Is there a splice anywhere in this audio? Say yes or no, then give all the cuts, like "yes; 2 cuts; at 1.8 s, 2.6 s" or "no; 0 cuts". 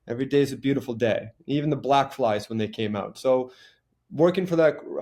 no; 0 cuts